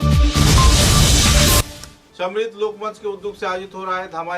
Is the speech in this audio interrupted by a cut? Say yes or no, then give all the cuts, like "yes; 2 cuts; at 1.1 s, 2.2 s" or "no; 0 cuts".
yes; 1 cut; at 1.6 s